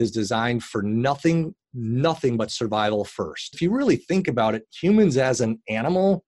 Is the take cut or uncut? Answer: cut